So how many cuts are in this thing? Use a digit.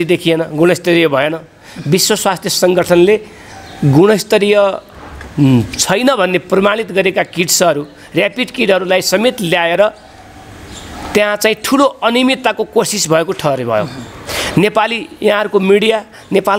0